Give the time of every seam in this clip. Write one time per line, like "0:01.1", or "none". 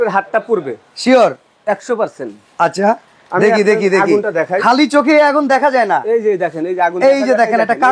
none